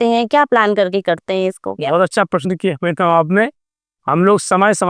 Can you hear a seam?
no; 0 cuts

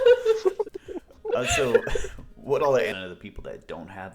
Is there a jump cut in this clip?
yes; 1 cut; at 2.9 s

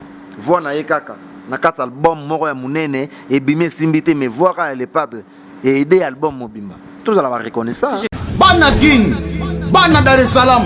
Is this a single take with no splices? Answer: no; 1 cut; at 8.1 s

